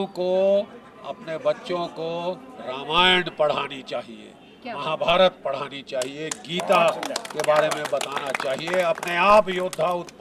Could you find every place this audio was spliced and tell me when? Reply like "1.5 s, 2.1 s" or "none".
none